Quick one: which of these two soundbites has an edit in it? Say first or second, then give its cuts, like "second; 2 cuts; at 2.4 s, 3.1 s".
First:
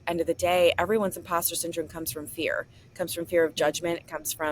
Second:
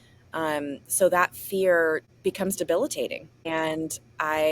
second; 2 cuts; at 2.1 s, 3.3 s